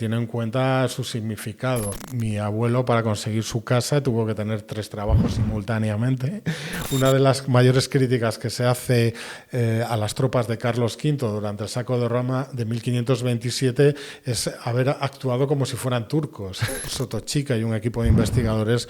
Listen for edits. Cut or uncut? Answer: cut